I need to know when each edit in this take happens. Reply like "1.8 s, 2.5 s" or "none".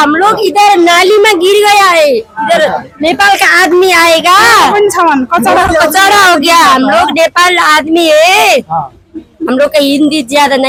none